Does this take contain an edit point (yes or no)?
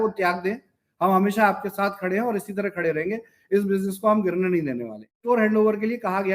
yes